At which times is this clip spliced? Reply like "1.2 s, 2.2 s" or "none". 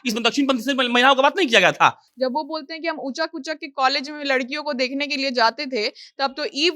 2.0 s